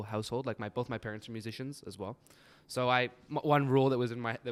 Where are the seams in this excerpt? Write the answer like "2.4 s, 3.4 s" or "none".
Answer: none

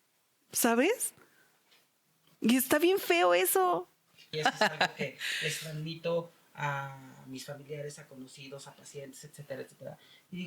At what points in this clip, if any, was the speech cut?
4.3 s

